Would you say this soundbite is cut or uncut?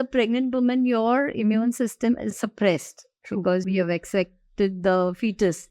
cut